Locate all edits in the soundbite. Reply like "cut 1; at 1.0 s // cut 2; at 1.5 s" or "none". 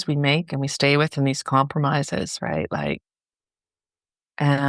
none